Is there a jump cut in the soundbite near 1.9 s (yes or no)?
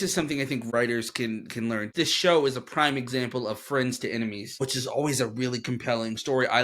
yes